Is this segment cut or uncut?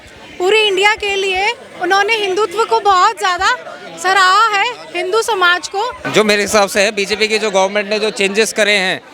cut